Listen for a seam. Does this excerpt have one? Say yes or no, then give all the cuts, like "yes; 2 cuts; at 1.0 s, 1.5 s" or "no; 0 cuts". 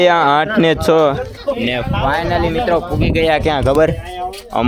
no; 0 cuts